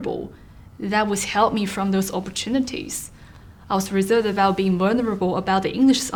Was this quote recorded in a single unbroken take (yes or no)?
yes